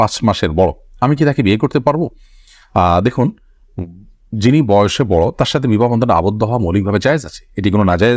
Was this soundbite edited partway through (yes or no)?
no